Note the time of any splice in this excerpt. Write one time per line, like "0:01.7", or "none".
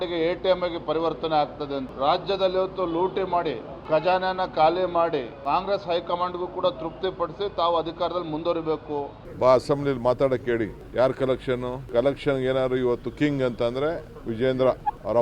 0:01.9
0:05.3
0:09.2
0:10.8